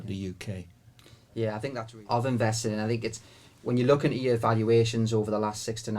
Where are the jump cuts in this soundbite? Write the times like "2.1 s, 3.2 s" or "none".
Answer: 1.8 s